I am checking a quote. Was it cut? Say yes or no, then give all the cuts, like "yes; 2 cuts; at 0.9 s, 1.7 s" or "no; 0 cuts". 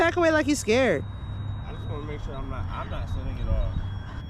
no; 0 cuts